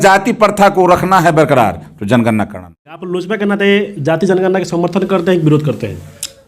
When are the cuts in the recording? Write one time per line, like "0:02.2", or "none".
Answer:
0:03.1